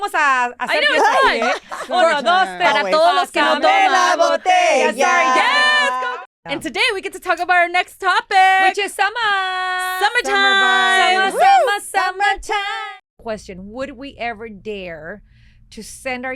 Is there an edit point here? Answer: yes; 2 cuts; at 6.0 s, 12.7 s

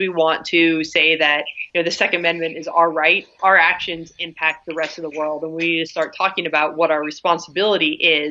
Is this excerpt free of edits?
no; 2 cuts; at 1.6 s, 3.4 s

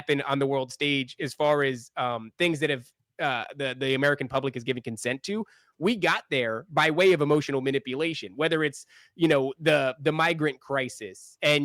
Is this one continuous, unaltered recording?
yes; 0 cuts

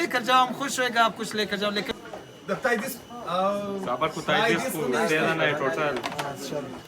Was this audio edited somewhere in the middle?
yes; 1 cut; at 1.9 s

